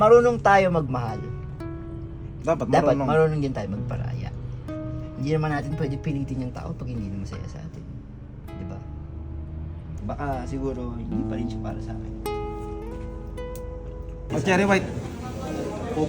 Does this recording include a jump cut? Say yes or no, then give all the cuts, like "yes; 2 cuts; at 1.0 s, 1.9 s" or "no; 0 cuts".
yes; 2 cuts; at 10.0 s, 14.3 s